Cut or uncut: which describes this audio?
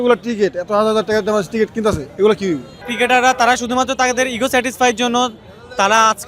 cut